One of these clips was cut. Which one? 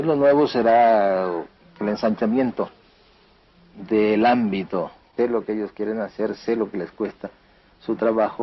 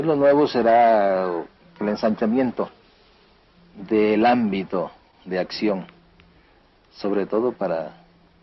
second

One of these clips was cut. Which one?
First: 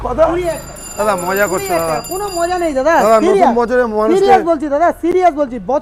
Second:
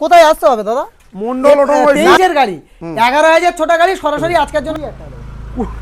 second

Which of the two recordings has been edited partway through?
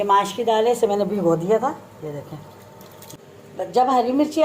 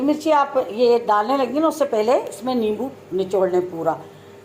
first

